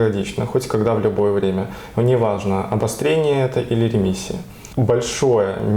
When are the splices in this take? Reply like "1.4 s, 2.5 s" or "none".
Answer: 4.7 s